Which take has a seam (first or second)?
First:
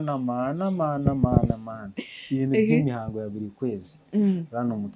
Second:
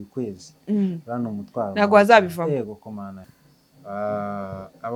second